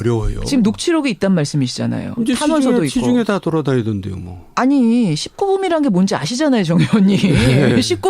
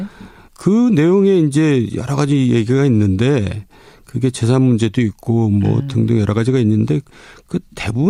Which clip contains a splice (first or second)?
first